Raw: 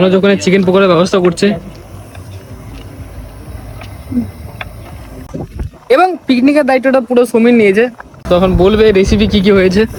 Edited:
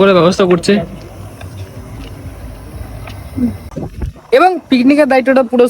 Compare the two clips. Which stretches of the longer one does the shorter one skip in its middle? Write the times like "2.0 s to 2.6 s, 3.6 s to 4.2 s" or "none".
4.4 s to 5.2 s

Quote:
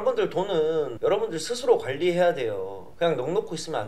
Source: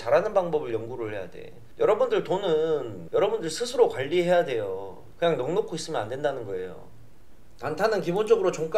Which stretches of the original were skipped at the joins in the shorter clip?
2.9 s to 3.0 s, 4.9 s to 5.0 s

